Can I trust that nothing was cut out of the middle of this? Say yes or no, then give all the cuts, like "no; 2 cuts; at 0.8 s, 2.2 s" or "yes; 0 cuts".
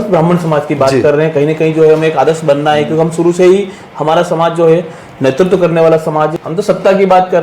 no; 1 cut; at 6.4 s